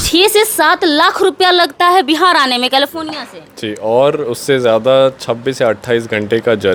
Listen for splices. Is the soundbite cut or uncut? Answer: uncut